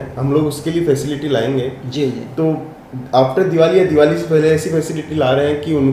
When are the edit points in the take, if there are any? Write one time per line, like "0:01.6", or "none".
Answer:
none